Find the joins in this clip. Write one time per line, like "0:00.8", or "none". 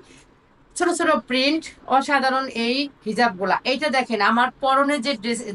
none